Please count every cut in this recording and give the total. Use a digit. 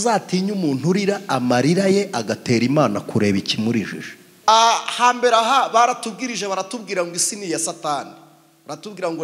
1